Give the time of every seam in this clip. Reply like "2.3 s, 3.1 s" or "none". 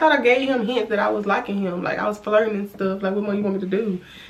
none